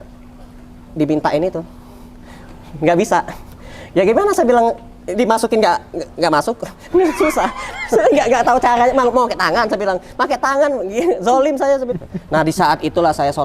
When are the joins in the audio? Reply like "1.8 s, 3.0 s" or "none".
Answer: 11.9 s